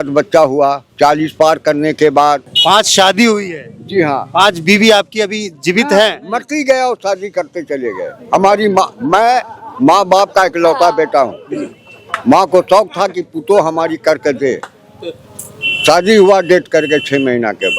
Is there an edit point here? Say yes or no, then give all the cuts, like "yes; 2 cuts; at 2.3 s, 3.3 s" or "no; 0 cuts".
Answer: yes; 2 cuts; at 0.8 s, 2.5 s